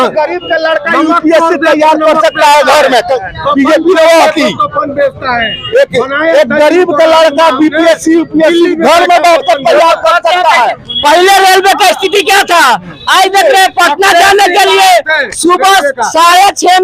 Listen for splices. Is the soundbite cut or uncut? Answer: uncut